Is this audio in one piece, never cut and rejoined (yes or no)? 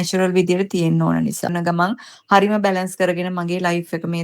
no